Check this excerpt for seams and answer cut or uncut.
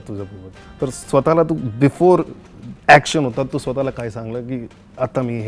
uncut